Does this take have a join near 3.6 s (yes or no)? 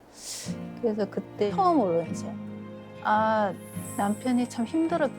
no